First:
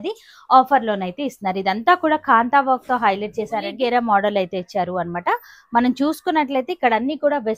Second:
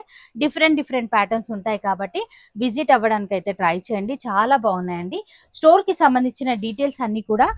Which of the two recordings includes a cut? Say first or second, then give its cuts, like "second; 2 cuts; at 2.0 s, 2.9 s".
first; 1 cut; at 3.7 s